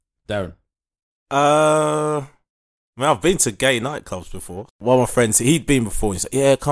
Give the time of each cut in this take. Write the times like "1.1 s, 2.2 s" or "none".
4.7 s